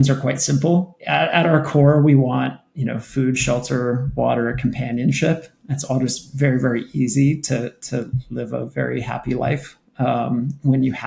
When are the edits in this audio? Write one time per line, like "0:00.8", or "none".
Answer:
0:01.0